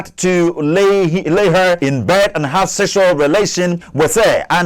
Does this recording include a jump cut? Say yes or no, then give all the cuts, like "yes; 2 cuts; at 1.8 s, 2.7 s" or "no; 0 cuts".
yes; 2 cuts; at 1.8 s, 3.8 s